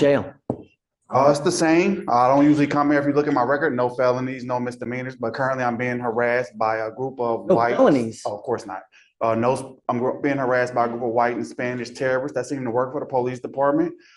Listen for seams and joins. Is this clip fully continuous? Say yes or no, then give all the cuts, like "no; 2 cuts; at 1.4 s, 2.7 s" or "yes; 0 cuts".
yes; 0 cuts